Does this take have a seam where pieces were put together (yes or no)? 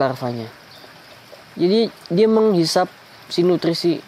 no